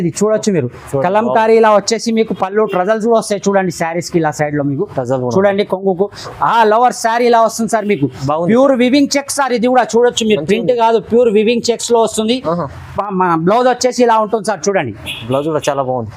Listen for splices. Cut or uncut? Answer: uncut